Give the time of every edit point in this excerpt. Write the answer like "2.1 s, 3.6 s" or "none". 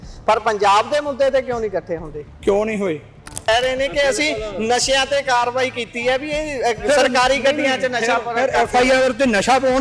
3.5 s